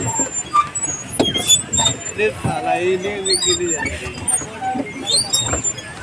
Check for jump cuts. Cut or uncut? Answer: uncut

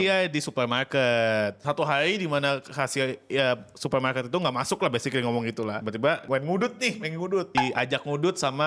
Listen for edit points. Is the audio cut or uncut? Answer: cut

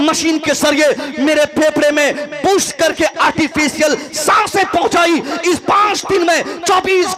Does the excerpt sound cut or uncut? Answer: uncut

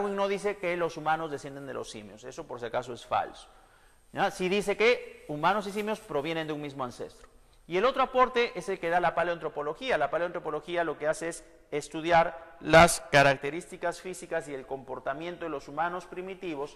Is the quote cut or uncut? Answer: uncut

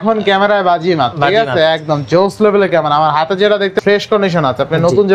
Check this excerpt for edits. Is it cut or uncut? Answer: cut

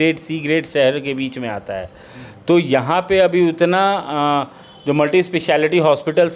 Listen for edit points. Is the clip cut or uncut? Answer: uncut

